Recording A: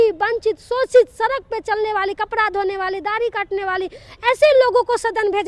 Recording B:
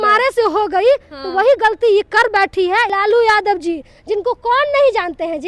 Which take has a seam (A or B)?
B